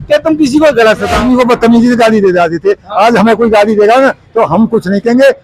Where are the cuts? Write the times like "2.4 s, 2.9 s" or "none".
1.2 s